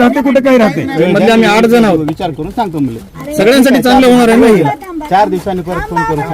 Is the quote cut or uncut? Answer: cut